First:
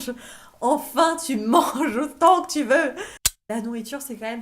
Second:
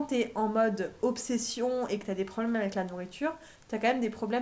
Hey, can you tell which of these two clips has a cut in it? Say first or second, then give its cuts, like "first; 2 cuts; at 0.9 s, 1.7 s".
first; 1 cut; at 3.2 s